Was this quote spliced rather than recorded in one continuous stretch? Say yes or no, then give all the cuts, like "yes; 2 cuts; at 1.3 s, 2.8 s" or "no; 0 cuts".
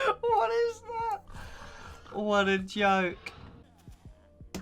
yes; 1 cut; at 3.7 s